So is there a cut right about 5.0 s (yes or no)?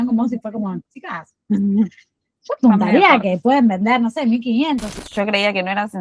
yes